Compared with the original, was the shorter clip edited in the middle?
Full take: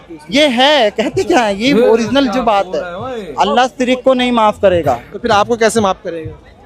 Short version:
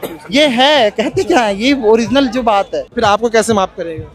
yes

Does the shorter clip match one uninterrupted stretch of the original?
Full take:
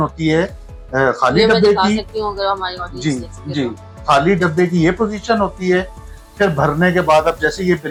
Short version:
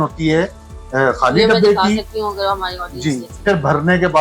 no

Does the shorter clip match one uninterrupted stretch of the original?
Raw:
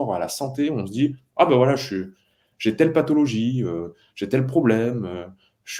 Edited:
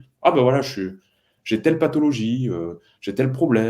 yes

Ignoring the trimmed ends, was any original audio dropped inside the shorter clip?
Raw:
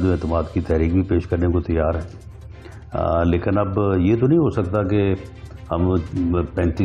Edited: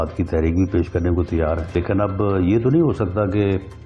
yes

